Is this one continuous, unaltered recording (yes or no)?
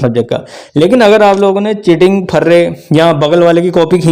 yes